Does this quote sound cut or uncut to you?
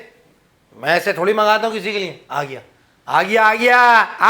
uncut